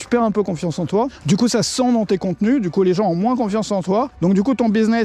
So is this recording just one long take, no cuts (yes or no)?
no